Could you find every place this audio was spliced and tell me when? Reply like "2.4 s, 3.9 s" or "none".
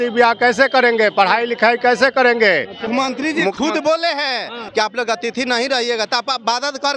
2.9 s, 4.6 s